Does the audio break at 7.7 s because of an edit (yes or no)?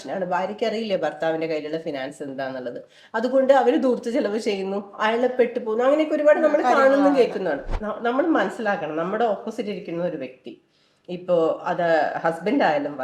yes